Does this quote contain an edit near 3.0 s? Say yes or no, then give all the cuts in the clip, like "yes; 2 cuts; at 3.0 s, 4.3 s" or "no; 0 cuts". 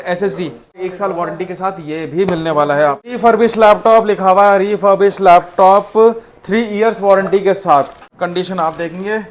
yes; 3 cuts; at 0.8 s, 3.0 s, 8.2 s